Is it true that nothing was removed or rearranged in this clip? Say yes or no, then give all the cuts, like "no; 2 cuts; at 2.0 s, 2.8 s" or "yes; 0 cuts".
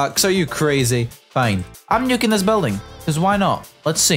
no; 1 cut; at 1.8 s